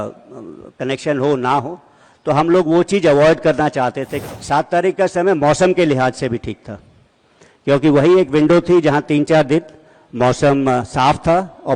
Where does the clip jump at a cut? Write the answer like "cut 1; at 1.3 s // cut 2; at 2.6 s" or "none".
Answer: cut 1; at 4.2 s